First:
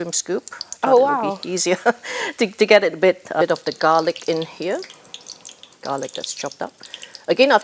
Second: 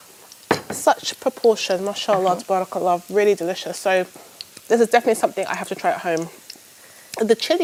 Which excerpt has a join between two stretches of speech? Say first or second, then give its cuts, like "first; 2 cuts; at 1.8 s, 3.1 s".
first; 1 cut; at 3.4 s